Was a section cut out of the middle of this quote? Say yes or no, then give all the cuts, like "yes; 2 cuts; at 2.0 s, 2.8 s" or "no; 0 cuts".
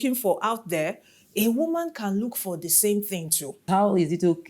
yes; 1 cut; at 3.5 s